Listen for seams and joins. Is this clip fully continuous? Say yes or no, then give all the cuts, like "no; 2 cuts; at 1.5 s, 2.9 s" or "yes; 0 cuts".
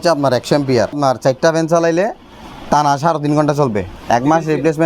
no; 2 cuts; at 1.0 s, 3.9 s